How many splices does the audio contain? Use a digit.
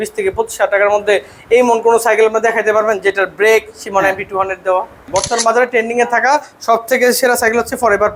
1